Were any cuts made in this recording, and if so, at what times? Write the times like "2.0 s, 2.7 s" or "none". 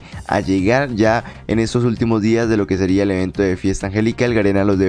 none